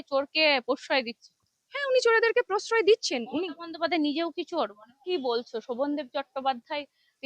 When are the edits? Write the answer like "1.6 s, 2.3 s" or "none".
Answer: 5.0 s